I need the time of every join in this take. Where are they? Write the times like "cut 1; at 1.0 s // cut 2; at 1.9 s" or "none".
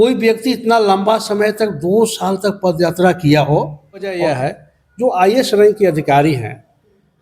cut 1; at 4.2 s